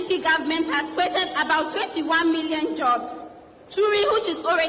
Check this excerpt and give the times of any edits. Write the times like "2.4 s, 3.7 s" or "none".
none

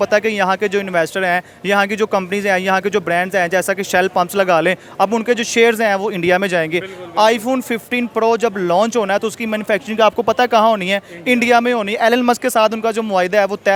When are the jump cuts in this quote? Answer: none

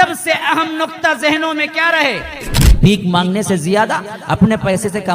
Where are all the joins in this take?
2.6 s

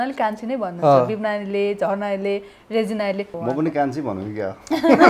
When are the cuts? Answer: 3.3 s

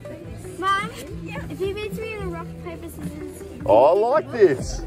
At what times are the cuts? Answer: none

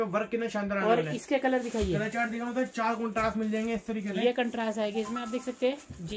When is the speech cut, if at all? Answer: none

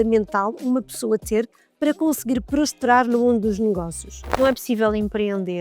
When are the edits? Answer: 4.4 s

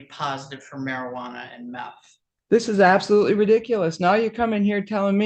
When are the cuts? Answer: 2.4 s

